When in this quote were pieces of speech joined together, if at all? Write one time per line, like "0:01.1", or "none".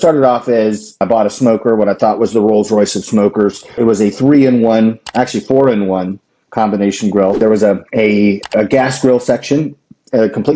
0:01.0
0:03.7
0:07.4